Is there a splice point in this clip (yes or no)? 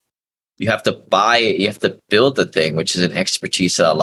no